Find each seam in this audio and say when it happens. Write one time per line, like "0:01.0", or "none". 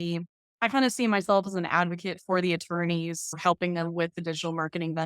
0:03.4